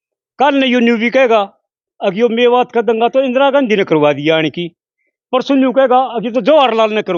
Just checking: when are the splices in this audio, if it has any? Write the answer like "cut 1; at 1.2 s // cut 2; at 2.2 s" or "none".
none